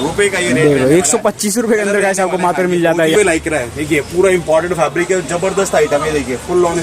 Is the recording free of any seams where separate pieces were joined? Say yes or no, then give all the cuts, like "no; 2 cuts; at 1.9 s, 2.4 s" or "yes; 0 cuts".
no; 1 cut; at 3.1 s